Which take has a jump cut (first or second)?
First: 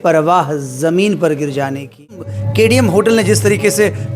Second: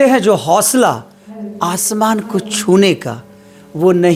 first